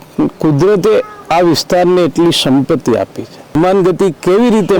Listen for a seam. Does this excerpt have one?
yes; 1 cut; at 3.5 s

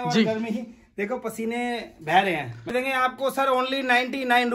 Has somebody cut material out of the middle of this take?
yes; 1 cut; at 2.7 s

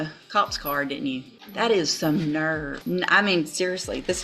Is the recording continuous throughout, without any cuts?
no; 2 cuts; at 1.4 s, 2.7 s

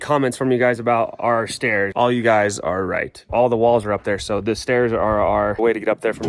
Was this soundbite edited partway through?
yes; 2 cuts; at 1.9 s, 3.3 s

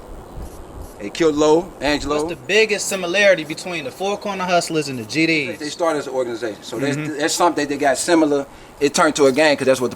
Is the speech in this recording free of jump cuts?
no; 2 cuts; at 2.4 s, 5.7 s

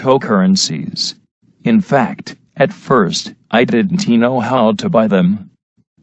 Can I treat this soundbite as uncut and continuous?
no; 1 cut; at 4.0 s

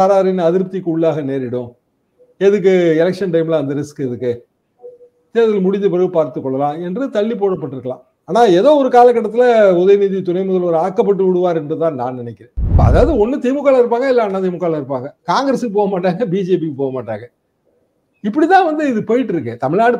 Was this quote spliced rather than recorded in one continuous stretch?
yes; 1 cut; at 12.8 s

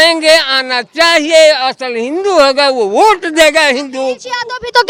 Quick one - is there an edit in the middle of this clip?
no; 0 cuts

